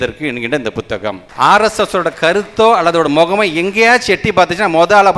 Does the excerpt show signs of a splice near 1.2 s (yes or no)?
yes